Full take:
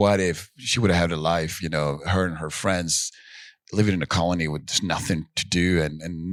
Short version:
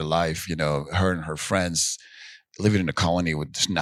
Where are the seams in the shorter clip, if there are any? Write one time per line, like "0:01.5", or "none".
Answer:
none